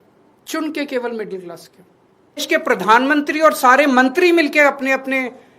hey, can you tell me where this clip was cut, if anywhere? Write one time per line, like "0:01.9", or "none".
0:02.4

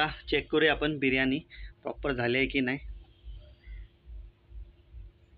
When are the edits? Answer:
none

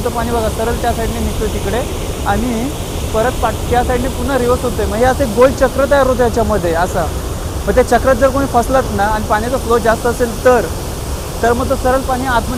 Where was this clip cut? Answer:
none

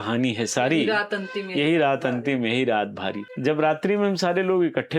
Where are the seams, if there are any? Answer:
0:03.3

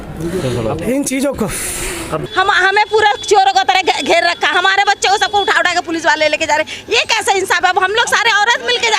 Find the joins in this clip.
0:02.2

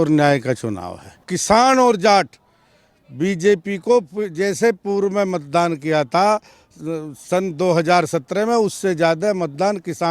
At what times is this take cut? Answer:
0:01.3

